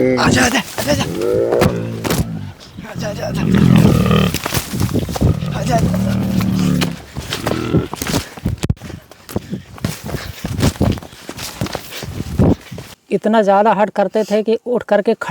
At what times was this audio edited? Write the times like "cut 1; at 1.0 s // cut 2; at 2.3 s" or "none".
cut 1; at 12.9 s